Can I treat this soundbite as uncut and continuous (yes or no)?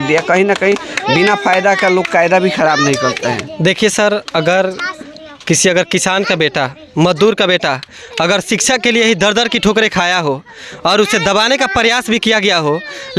yes